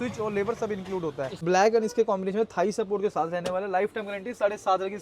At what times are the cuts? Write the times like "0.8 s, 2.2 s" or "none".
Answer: 1.4 s